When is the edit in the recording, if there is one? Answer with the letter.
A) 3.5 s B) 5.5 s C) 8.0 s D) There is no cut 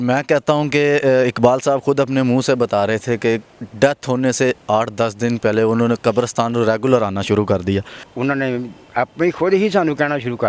C